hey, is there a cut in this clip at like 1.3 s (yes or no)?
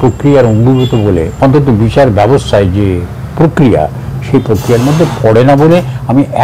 yes